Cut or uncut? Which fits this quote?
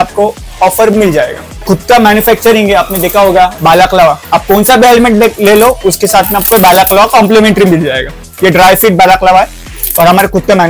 cut